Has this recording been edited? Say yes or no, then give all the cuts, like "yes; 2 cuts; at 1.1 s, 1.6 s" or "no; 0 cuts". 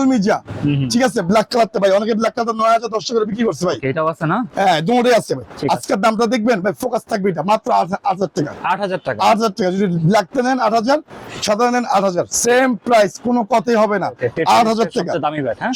no; 0 cuts